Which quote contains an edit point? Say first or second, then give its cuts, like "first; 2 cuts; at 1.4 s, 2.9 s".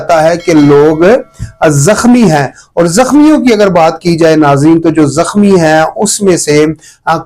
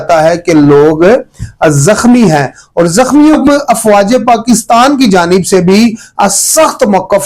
second; 1 cut; at 3.4 s